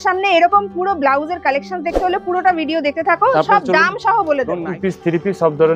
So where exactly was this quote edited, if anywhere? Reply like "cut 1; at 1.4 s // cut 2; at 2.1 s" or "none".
cut 1; at 4.7 s